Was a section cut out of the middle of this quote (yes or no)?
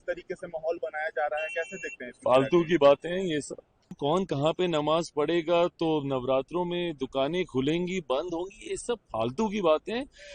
yes